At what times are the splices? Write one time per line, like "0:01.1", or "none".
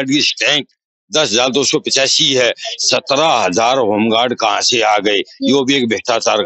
none